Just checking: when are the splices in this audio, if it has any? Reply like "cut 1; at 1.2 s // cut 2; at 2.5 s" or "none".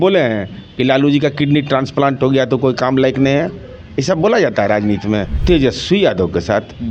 cut 1; at 5.3 s